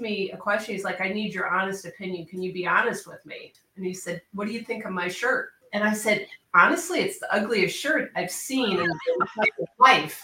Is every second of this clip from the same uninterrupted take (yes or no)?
no